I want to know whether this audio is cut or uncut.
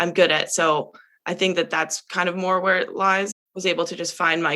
cut